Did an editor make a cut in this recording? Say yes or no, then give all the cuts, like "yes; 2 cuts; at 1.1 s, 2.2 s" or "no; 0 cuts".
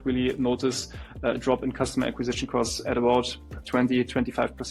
no; 0 cuts